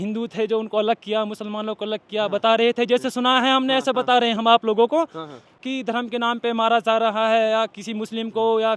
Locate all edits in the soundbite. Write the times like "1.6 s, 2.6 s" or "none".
5.6 s